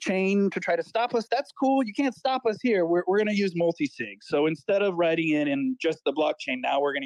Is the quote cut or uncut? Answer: cut